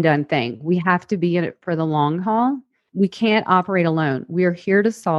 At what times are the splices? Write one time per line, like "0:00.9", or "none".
0:02.8